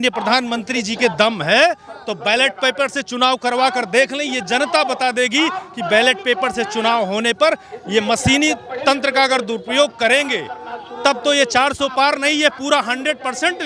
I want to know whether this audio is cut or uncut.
uncut